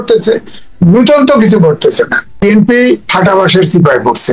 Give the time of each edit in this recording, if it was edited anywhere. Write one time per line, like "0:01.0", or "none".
0:02.4